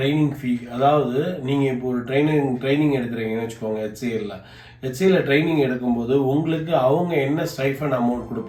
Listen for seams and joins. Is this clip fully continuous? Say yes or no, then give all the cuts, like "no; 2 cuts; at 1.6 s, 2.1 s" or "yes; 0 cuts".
yes; 0 cuts